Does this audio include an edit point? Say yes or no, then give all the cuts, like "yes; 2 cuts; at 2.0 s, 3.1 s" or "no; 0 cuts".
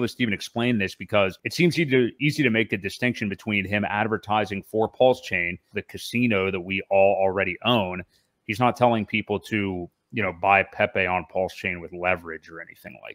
yes; 2 cuts; at 1.4 s, 5.8 s